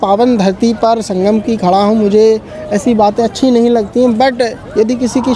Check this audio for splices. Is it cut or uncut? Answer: uncut